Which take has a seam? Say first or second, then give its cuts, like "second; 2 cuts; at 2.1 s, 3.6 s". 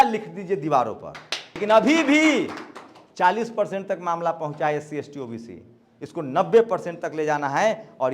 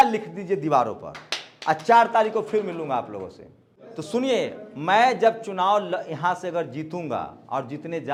first; 1 cut; at 1.6 s